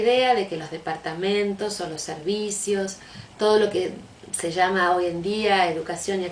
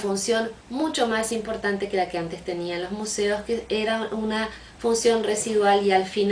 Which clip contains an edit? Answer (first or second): first